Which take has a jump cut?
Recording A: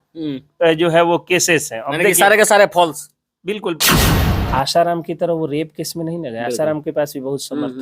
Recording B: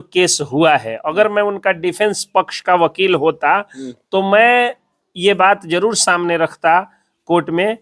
A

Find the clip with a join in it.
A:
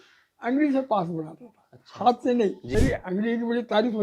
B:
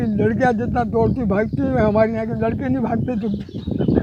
A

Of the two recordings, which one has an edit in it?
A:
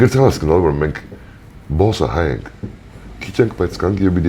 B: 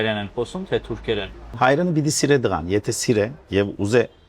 B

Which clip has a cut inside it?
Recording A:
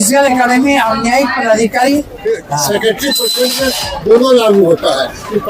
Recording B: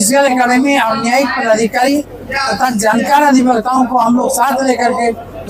A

